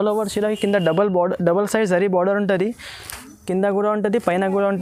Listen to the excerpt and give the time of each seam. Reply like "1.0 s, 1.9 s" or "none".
none